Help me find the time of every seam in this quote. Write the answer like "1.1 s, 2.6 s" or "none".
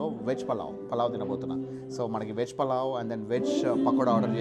none

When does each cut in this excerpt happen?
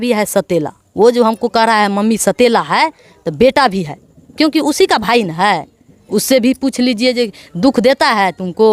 none

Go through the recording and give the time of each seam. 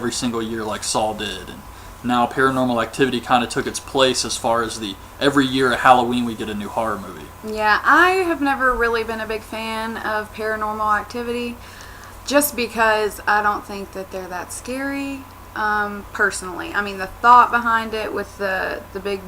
17.1 s

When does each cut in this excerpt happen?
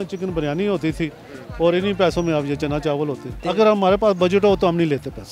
3.4 s

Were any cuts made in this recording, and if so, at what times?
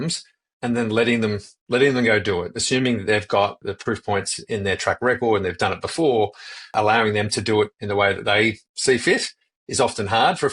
3.6 s, 6.7 s

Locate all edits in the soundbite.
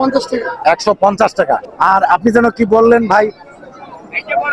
1.7 s

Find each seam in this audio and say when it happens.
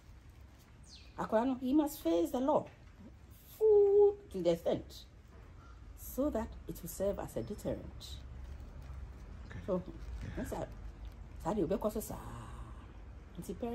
none

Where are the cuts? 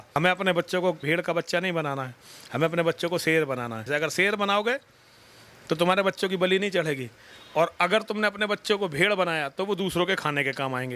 1.0 s, 3.9 s

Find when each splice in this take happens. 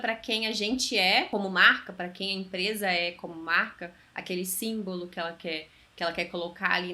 1.3 s

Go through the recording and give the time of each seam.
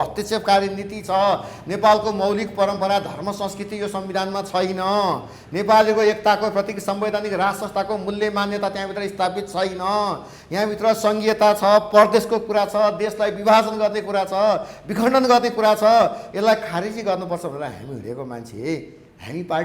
none

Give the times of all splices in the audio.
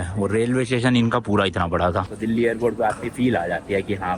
2.1 s

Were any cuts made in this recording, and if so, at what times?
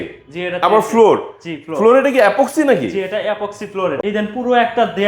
4.0 s

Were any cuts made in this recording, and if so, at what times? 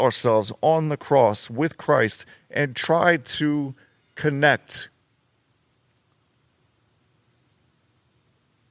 none

